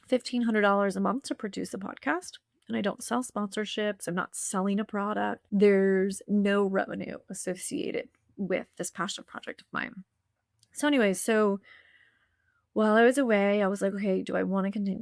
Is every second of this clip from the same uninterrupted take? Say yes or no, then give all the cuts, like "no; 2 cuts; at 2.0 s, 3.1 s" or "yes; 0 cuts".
yes; 0 cuts